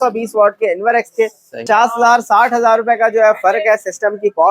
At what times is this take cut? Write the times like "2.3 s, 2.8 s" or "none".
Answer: 1.6 s